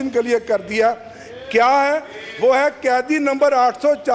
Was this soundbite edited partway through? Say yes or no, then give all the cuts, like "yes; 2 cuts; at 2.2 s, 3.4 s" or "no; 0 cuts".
no; 0 cuts